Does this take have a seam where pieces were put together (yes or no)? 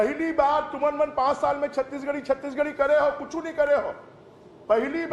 no